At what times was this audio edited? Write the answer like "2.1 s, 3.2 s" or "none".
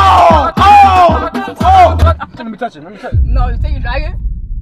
none